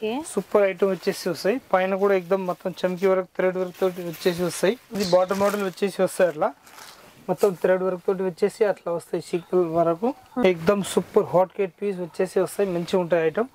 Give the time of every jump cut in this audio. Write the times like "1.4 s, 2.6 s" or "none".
4.9 s, 10.3 s